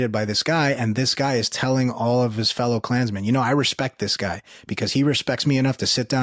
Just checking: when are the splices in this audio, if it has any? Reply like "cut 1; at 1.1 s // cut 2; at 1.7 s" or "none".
none